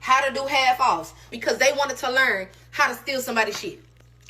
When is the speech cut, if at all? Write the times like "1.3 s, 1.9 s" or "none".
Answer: 1.3 s